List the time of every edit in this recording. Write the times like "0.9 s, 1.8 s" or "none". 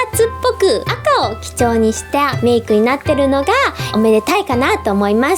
0.9 s, 2.3 s, 3.9 s